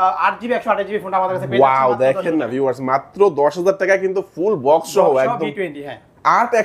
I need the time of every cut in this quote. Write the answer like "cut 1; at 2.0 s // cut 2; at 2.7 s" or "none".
none